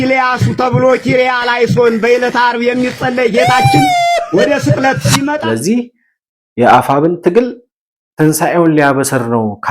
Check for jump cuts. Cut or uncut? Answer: cut